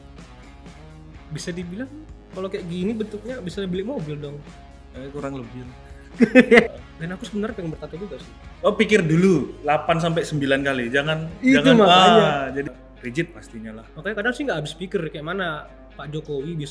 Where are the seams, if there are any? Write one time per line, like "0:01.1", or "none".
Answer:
0:06.7
0:12.6